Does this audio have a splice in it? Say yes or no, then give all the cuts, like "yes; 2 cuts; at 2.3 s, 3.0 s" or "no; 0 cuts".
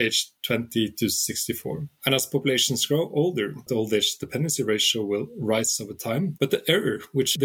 yes; 2 cuts; at 3.6 s, 6.3 s